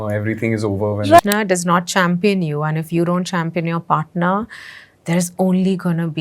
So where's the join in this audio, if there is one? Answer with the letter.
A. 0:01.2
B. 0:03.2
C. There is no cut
A